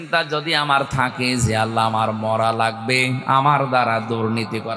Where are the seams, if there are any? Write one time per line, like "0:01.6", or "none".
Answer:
none